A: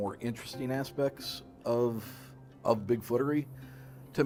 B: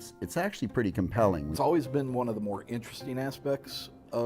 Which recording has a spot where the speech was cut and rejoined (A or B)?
B